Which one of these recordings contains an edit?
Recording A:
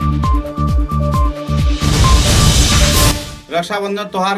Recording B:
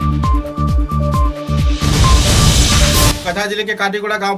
A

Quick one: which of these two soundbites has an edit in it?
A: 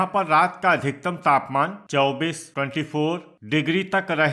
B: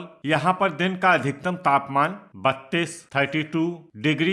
A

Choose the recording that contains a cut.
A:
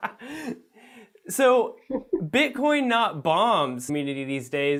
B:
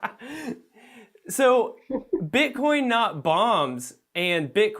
B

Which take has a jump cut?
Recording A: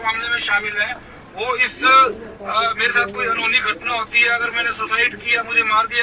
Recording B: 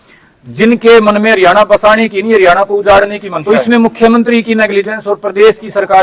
B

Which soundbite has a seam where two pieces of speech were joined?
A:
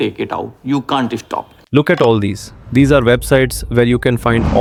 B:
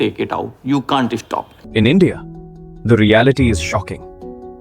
B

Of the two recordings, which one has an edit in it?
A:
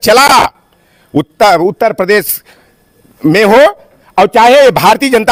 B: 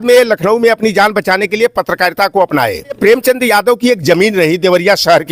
B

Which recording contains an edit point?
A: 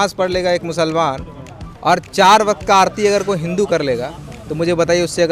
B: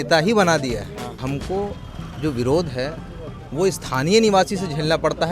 B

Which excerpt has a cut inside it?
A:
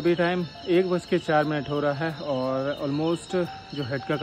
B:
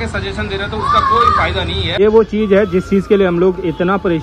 B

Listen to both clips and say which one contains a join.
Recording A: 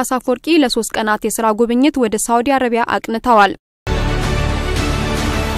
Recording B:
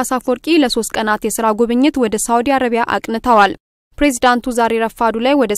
A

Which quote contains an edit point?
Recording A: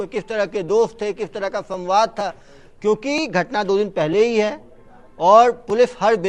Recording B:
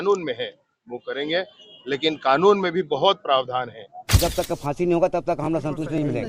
B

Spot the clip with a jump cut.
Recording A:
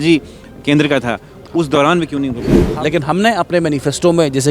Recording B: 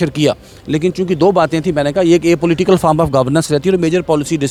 A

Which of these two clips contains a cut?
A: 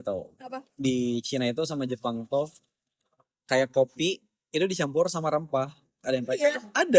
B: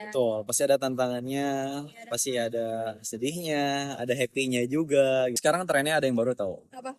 B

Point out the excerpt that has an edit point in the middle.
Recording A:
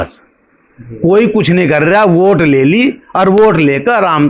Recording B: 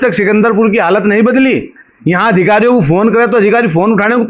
B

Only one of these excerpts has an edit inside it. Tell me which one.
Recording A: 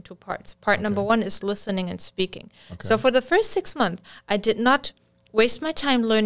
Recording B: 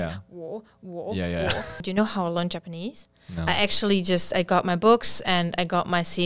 B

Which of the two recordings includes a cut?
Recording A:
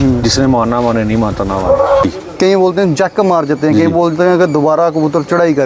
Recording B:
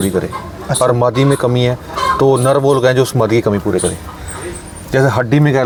A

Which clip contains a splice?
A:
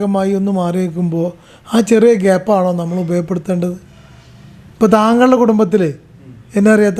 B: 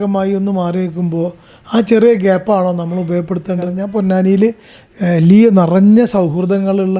B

